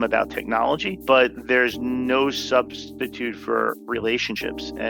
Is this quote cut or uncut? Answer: cut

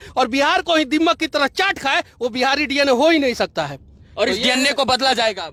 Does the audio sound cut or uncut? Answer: uncut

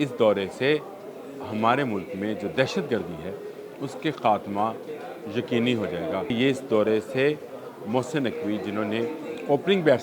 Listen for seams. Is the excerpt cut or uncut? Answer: cut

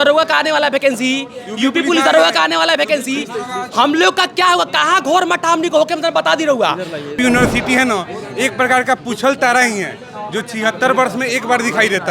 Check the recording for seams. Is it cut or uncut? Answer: cut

